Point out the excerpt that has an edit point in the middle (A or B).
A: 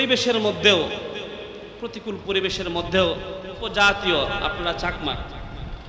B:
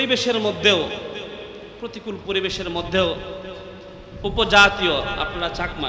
A